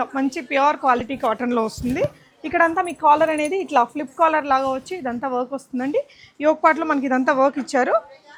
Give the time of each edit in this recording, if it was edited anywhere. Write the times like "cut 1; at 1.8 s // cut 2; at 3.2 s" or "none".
none